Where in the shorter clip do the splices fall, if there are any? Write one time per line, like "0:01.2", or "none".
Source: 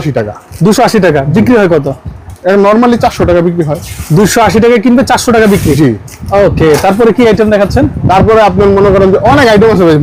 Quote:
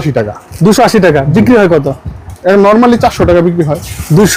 none